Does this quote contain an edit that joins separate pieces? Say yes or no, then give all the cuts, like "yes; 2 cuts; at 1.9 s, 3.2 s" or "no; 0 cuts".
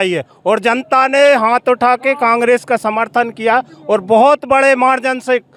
no; 0 cuts